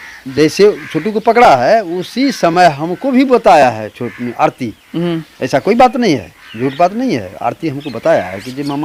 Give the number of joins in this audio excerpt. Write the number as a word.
zero